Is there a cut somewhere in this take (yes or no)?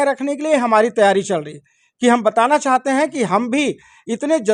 no